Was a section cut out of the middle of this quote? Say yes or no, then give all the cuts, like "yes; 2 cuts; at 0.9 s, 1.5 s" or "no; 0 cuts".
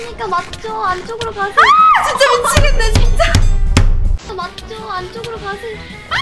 no; 0 cuts